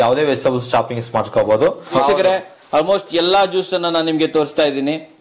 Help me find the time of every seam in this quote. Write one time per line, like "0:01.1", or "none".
0:02.0